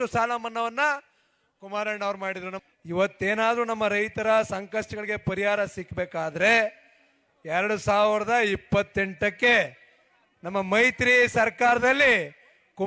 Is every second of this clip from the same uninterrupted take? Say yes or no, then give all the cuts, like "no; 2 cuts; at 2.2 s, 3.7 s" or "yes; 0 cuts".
no; 1 cut; at 2.5 s